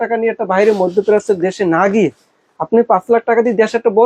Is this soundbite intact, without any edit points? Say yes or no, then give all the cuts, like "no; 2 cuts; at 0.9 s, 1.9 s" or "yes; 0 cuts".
yes; 0 cuts